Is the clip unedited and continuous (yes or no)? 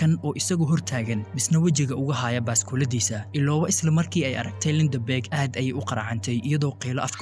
yes